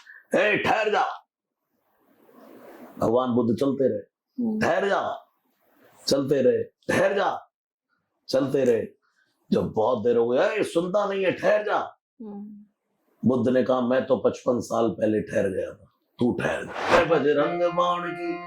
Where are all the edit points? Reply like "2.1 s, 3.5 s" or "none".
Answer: 17.0 s